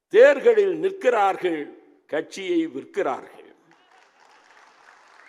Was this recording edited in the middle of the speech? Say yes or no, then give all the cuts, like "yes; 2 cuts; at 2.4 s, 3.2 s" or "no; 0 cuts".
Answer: no; 0 cuts